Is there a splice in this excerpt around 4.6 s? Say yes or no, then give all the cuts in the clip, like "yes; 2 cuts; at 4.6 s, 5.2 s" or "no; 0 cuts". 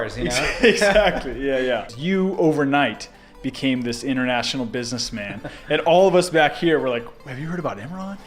no; 1 cut; at 1.9 s